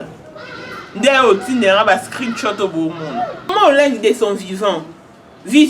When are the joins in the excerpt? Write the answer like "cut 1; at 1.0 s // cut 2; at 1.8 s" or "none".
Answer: cut 1; at 3.5 s